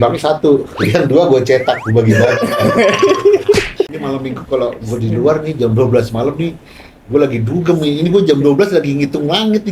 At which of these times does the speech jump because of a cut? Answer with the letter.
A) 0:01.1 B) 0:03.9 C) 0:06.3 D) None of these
B